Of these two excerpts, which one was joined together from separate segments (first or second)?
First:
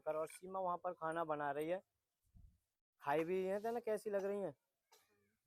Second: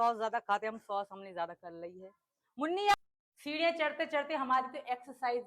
second